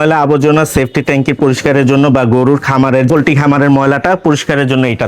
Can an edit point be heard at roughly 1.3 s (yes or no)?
no